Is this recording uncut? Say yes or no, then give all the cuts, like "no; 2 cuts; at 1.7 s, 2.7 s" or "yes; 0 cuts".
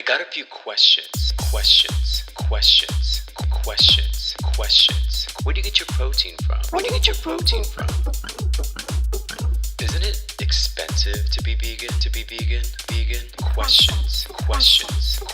no; 1 cut; at 0.9 s